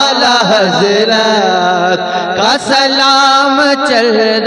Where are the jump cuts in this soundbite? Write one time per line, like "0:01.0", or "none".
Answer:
none